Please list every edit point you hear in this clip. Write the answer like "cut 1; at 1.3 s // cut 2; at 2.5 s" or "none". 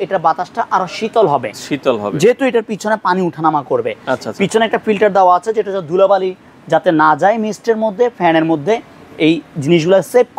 none